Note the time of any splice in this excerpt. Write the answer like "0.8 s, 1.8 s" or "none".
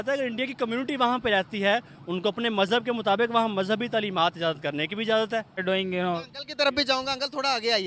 5.6 s